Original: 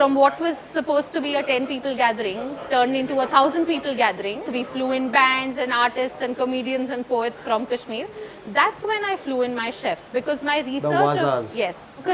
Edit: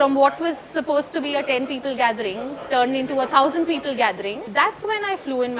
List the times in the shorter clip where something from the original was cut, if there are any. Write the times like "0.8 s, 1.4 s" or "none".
4.4 s